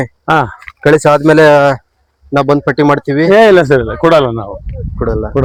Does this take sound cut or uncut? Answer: uncut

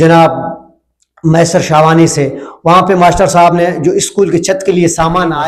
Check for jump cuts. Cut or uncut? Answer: uncut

